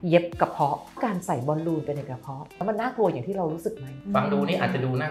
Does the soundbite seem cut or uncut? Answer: cut